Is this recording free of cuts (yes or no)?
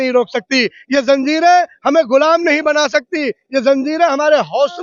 yes